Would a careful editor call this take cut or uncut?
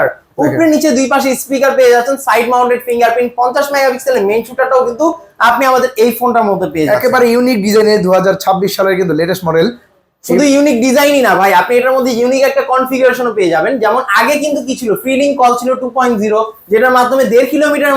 uncut